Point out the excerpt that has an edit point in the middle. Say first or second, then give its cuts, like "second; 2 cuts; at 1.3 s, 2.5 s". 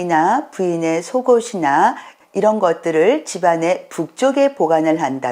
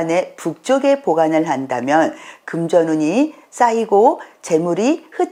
first; 1 cut; at 2.1 s